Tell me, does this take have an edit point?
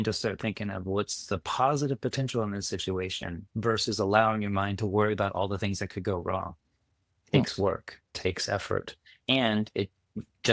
no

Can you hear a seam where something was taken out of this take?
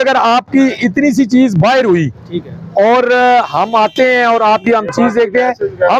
no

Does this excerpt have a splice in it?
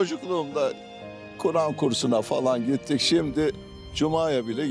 no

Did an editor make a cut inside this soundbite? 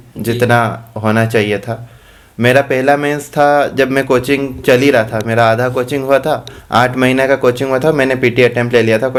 no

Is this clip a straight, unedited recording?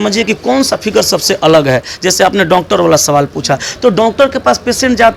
yes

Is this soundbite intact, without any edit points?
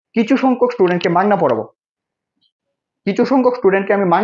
yes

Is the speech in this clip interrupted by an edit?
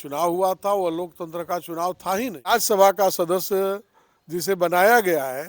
yes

